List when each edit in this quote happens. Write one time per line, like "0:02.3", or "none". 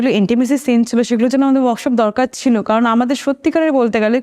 none